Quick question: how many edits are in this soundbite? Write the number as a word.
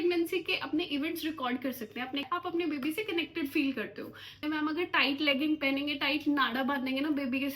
two